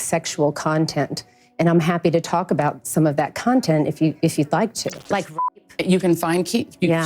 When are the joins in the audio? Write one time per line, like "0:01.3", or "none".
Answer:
0:05.3